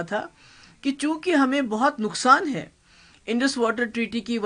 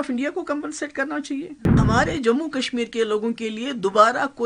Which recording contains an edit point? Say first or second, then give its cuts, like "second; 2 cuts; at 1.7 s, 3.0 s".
second; 1 cut; at 1.8 s